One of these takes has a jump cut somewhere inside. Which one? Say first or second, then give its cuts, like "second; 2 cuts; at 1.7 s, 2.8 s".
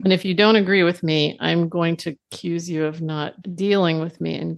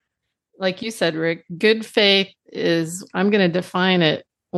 first; 1 cut; at 3.4 s